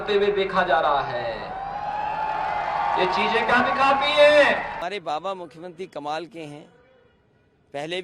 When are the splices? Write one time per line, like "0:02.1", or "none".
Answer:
0:04.8